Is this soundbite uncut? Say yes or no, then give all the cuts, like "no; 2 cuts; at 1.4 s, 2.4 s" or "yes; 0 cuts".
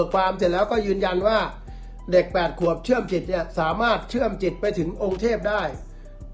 yes; 0 cuts